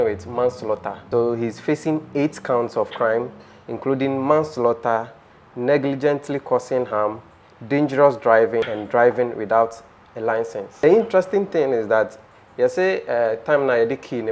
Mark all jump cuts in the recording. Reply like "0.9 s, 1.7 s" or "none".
1.0 s, 8.8 s, 10.7 s